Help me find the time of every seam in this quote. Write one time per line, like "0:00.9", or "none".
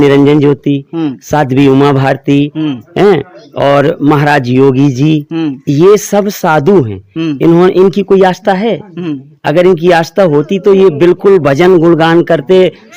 none